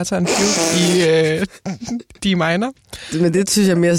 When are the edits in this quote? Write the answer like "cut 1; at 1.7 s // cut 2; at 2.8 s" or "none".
cut 1; at 3.1 s